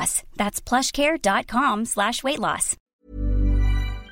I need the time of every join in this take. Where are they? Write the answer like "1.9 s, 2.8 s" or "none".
2.9 s